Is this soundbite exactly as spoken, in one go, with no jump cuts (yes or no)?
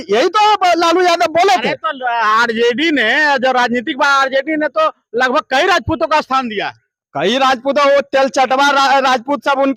yes